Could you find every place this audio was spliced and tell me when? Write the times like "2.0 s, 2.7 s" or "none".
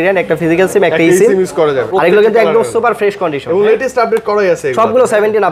1.8 s